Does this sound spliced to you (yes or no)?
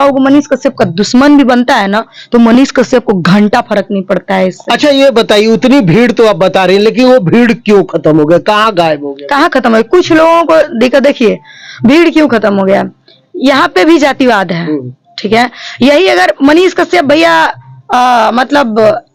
no